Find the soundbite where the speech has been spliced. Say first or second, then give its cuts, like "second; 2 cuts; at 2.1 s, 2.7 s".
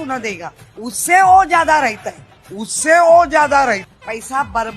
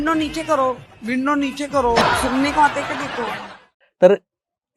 second; 1 cut; at 3.6 s